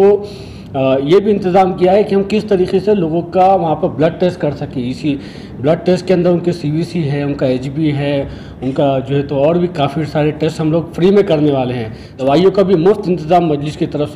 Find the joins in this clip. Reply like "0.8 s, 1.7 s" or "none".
12.2 s